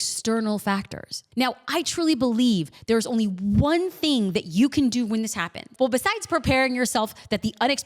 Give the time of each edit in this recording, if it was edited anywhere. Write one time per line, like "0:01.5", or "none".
0:05.6